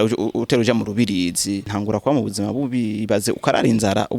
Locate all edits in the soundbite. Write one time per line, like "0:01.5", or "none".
0:01.7